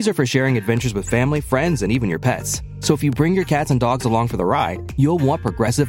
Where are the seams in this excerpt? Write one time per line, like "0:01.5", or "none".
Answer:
none

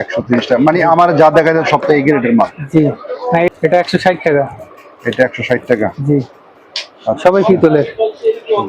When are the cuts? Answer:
0:03.5

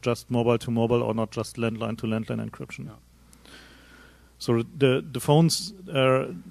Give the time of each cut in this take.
none

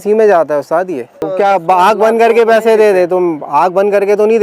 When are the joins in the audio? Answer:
0:01.3

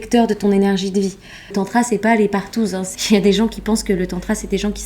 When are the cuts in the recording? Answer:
0:01.5
0:02.9

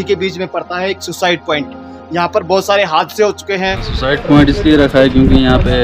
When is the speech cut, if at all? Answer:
0:04.0

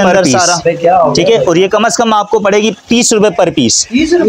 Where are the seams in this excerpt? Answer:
0:01.1

